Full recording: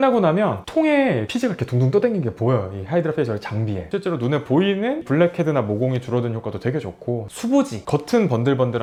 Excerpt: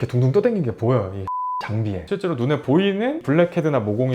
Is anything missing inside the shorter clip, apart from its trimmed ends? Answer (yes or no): yes